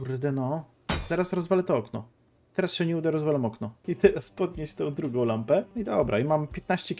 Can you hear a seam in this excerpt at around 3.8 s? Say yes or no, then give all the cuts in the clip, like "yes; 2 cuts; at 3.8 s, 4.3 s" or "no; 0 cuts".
yes; 2 cuts; at 3.8 s, 5.7 s